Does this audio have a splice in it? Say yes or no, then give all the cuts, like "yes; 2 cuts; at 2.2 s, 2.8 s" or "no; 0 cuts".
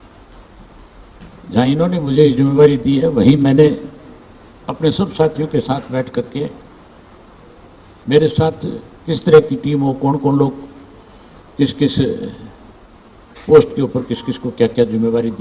no; 0 cuts